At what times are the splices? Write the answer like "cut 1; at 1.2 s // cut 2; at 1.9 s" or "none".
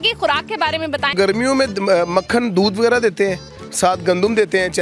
cut 1; at 1.1 s

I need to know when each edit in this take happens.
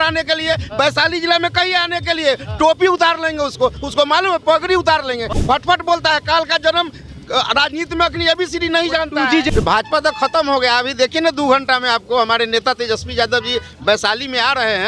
cut 1; at 5.3 s // cut 2; at 9.5 s

